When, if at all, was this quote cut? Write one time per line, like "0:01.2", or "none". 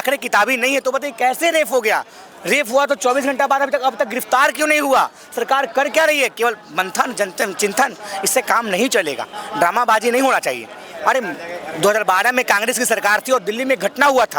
none